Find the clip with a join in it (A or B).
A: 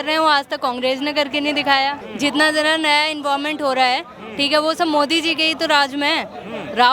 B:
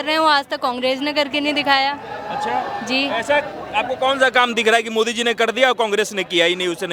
A